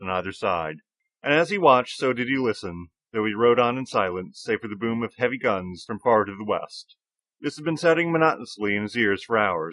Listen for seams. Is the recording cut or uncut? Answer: uncut